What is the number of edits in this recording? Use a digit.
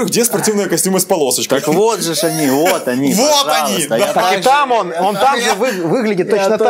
0